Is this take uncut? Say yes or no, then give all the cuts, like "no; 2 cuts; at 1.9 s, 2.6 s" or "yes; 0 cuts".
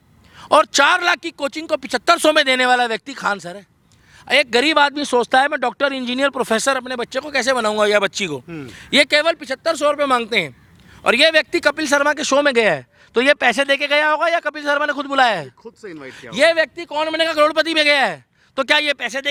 yes; 0 cuts